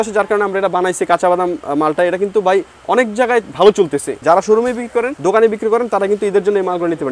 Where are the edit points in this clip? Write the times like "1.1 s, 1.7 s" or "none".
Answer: 4.2 s, 5.1 s